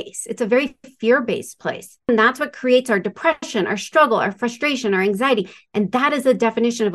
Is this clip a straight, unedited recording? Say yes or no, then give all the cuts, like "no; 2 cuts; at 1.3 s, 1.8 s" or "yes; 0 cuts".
no; 1 cut; at 2.1 s